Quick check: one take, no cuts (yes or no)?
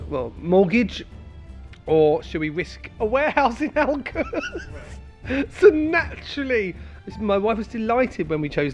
yes